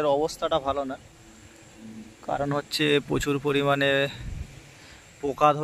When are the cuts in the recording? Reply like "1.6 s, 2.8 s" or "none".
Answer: none